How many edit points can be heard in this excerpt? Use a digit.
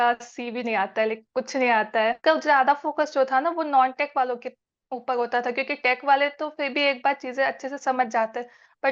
1